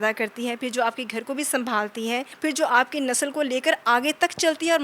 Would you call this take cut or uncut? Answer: cut